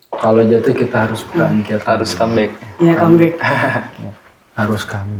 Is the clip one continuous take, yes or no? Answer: yes